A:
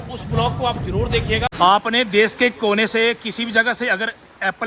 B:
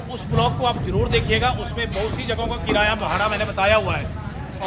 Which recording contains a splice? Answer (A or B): A